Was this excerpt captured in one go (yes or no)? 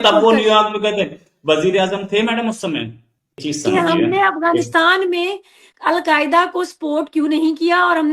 no